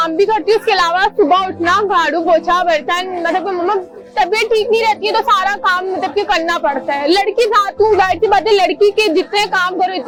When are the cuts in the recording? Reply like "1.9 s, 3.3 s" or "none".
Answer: none